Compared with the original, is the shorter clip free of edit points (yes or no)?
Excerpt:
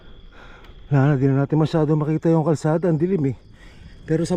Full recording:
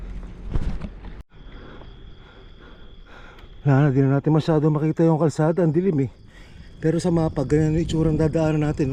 yes